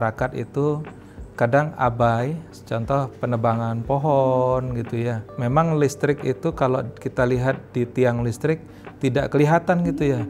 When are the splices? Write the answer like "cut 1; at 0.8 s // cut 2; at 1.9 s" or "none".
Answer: cut 1; at 2.4 s // cut 2; at 5.3 s